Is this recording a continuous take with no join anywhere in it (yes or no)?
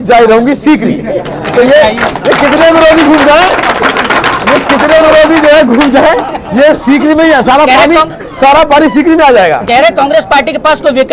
yes